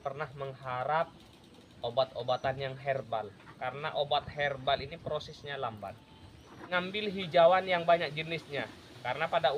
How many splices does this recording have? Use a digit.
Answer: 1